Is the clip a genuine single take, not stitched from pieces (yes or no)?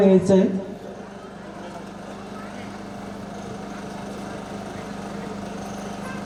yes